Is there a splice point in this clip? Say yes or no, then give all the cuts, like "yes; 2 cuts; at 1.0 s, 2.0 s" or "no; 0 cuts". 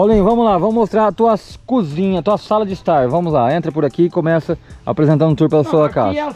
no; 0 cuts